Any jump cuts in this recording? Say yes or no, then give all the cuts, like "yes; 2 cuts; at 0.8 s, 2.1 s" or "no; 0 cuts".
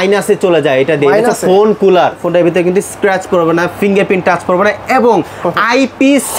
yes; 1 cut; at 2.2 s